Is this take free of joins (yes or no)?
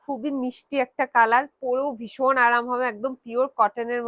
yes